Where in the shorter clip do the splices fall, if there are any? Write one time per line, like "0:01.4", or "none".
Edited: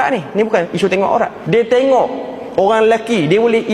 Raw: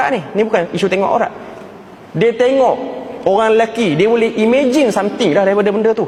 0:01.4

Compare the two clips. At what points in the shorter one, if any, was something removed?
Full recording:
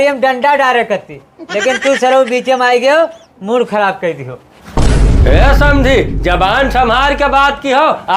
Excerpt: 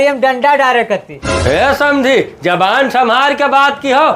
0:01.4

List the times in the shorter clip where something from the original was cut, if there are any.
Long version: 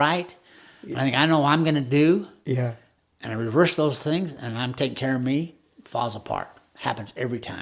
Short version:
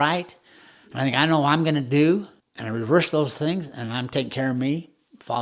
0:02.4

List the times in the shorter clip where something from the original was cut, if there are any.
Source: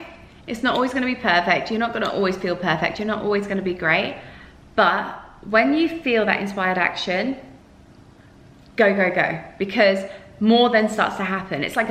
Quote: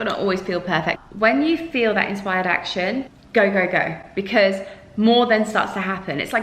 0:01.0
0:03.2

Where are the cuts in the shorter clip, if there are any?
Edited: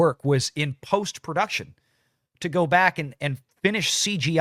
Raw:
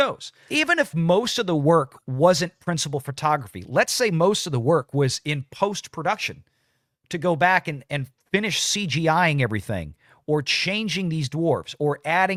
none

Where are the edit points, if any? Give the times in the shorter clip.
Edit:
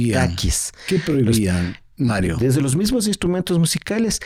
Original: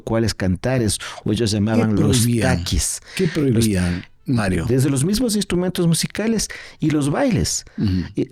none

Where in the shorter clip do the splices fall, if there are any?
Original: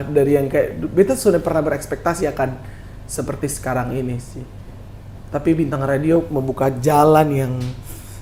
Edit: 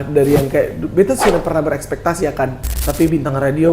0:02.7

